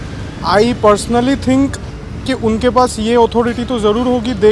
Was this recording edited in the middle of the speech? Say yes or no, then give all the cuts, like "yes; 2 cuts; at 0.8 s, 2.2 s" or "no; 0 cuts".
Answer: no; 0 cuts